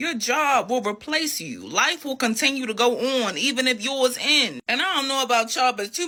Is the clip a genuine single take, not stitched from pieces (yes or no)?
yes